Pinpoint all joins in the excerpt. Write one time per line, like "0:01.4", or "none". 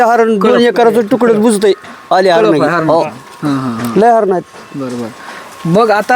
none

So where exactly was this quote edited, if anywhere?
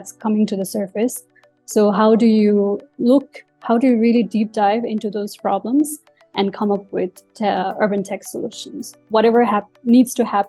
0:09.0

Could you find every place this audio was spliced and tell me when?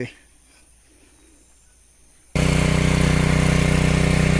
0:02.3

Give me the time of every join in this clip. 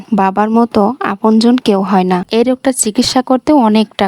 0:02.3

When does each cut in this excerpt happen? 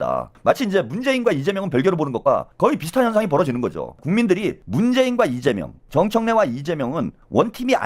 0:04.4
0:05.7

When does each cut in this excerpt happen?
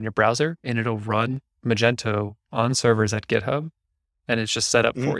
0:01.5

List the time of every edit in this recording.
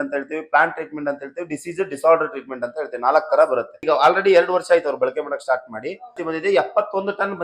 0:03.8
0:06.2

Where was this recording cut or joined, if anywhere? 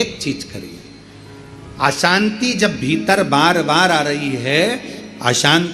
none

